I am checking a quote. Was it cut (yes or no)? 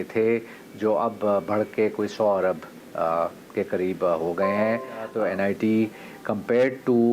yes